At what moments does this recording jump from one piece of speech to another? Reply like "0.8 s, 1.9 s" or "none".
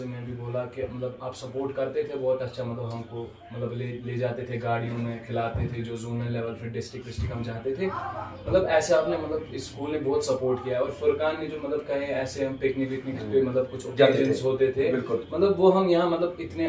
none